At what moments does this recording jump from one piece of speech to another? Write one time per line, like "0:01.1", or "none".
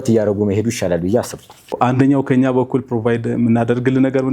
0:01.7